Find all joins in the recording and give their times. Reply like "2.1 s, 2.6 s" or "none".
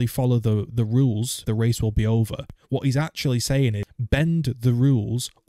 1.4 s, 2.5 s, 3.9 s